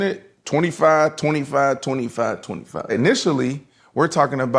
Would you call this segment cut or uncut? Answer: cut